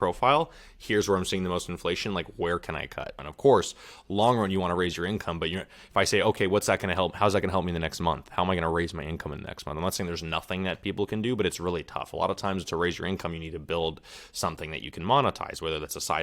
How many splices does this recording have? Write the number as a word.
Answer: one